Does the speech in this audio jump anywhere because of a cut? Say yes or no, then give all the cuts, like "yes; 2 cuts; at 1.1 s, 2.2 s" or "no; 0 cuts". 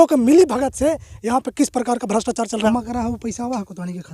yes; 1 cut; at 2.7 s